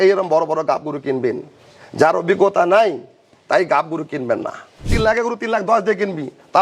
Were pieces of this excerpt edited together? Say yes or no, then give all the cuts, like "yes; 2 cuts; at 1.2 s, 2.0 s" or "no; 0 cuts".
yes; 1 cut; at 4.9 s